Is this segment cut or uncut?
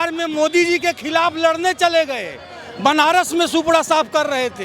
uncut